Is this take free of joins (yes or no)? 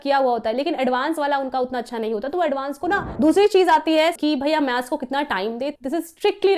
no